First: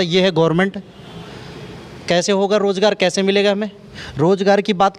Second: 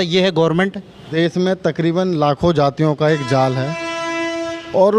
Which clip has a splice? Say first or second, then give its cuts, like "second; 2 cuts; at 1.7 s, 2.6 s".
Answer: second; 1 cut; at 1.1 s